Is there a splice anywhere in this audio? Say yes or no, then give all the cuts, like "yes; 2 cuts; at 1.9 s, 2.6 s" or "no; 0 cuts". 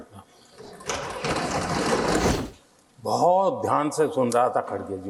yes; 1 cut; at 2.3 s